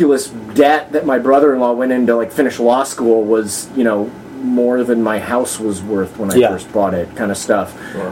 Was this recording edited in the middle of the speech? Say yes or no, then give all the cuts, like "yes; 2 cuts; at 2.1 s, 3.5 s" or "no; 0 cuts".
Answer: no; 0 cuts